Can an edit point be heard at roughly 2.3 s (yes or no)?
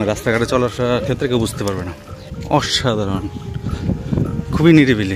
yes